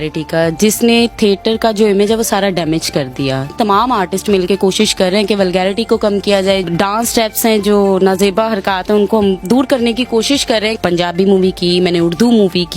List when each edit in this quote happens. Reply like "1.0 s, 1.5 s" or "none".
3.5 s, 6.6 s, 10.7 s